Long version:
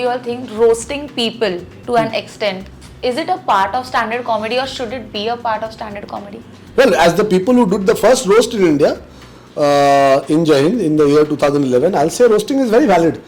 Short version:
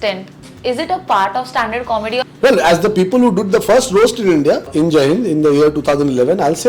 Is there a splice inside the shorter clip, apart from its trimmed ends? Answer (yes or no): yes